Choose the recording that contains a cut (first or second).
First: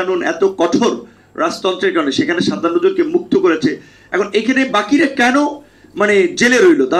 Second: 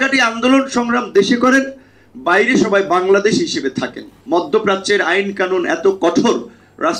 second